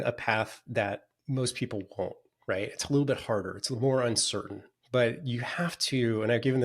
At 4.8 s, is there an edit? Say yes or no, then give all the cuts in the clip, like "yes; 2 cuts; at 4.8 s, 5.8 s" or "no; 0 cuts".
no; 1 cut; at 1.1 s